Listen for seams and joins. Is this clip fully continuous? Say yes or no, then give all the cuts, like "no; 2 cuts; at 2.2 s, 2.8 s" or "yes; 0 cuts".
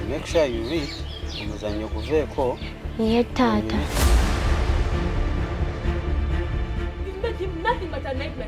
yes; 0 cuts